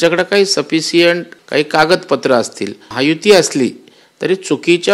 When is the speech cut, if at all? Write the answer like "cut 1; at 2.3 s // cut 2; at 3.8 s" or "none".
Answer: cut 1; at 1.3 s // cut 2; at 2.9 s